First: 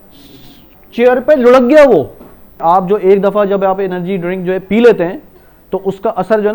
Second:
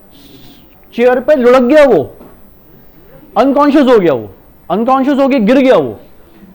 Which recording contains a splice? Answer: first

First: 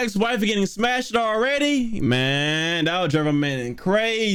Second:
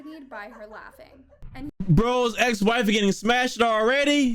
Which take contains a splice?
second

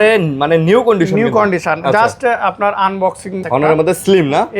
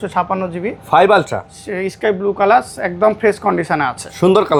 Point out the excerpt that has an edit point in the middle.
first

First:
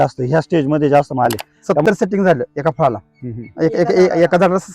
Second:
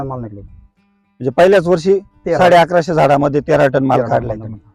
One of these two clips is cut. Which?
first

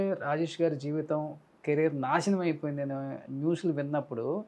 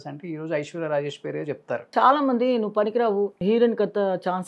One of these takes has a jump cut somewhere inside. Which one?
second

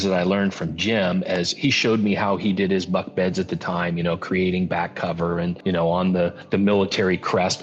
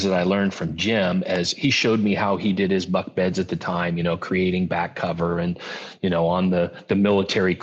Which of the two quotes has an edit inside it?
first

